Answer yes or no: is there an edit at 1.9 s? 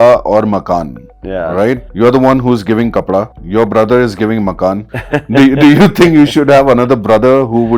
yes